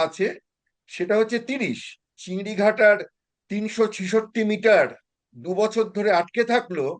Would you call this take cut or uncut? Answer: cut